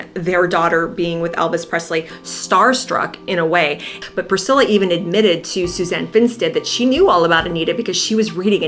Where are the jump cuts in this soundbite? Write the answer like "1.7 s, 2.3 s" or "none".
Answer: 3.9 s